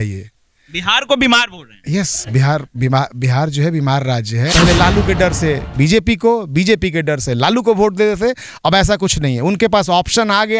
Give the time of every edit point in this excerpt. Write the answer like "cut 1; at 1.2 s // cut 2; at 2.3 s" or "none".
cut 1; at 4.5 s

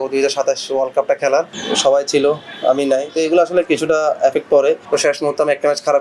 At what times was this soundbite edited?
cut 1; at 1.6 s // cut 2; at 4.8 s

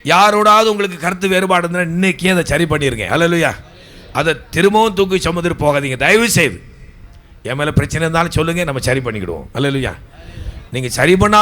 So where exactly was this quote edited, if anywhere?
none

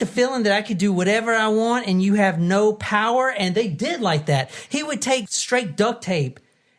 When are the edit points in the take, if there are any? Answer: cut 1; at 5.3 s

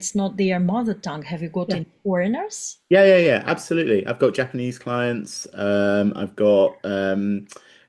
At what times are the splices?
none

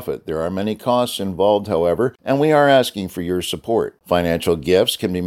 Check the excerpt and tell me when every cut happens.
cut 1; at 2.2 s

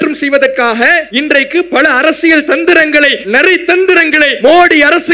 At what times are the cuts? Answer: cut 1; at 1.1 s // cut 2; at 3.2 s // cut 3; at 4.3 s

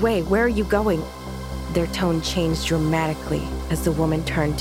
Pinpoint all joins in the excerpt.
none

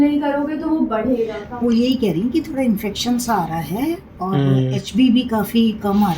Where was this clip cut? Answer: cut 1; at 1.5 s

